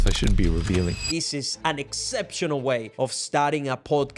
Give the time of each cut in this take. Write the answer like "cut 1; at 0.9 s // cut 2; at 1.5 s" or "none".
cut 1; at 1.1 s // cut 2; at 2.9 s